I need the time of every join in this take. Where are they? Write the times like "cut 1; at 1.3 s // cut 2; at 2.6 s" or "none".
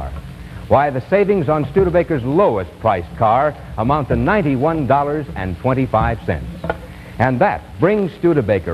cut 1; at 5.9 s